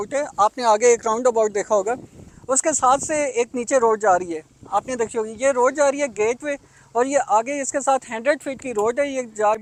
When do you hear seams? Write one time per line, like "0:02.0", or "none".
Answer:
none